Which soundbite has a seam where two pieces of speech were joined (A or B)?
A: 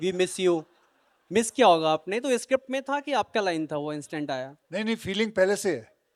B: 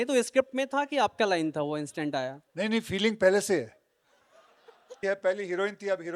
B